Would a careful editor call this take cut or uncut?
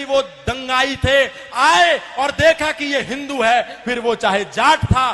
uncut